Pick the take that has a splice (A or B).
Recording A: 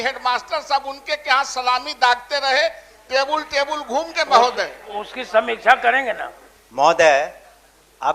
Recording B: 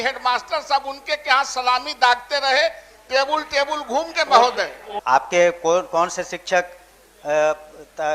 B